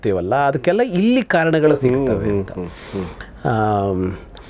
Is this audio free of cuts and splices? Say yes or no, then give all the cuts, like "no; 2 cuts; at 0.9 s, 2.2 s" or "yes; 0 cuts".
yes; 0 cuts